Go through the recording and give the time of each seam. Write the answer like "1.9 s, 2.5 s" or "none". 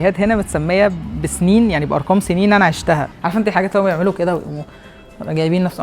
3.1 s

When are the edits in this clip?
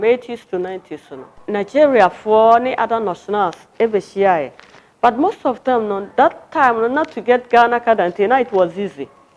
none

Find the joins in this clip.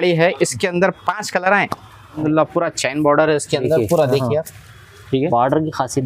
2.2 s

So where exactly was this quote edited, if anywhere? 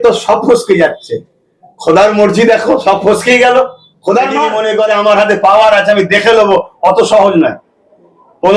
4.6 s

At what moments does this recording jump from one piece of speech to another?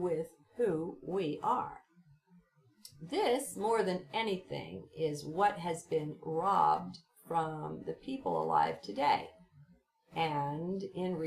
8.6 s

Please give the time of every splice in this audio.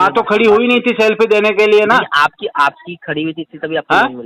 none

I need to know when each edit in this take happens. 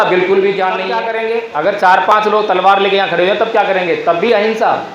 1.1 s

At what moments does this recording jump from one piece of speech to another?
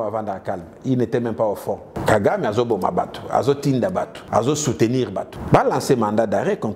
1.9 s, 4.2 s, 5.4 s

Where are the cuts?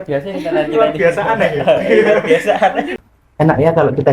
2.9 s

